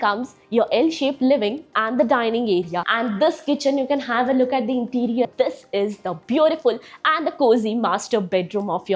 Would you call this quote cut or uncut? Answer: cut